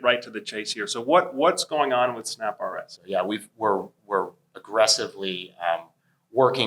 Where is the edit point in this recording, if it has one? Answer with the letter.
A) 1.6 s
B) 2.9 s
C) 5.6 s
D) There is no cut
B